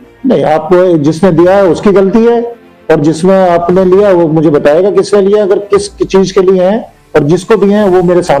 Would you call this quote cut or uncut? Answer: uncut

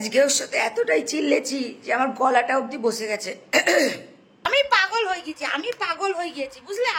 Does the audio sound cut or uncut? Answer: cut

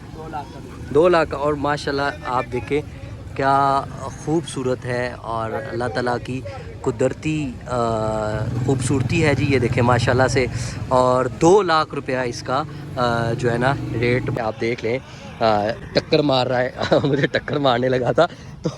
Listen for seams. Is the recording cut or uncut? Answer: cut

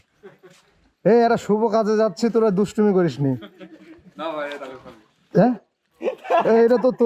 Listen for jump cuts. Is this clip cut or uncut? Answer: uncut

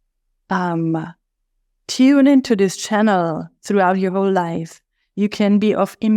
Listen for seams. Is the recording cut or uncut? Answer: uncut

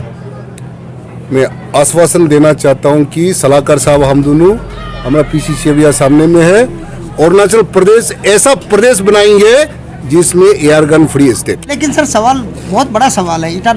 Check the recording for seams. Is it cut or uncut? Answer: cut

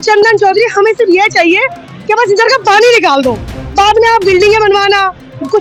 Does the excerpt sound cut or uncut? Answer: uncut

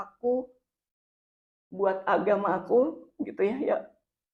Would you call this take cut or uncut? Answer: uncut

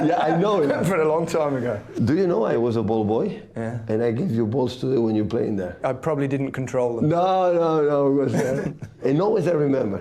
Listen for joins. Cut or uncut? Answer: uncut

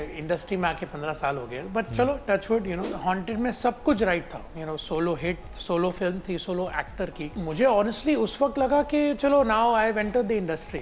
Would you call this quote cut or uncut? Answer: cut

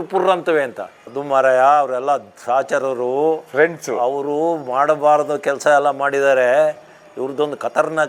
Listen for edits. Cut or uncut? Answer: uncut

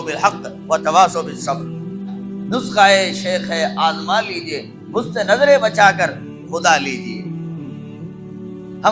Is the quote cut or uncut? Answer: cut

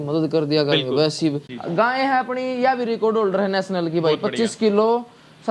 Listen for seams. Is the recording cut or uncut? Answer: cut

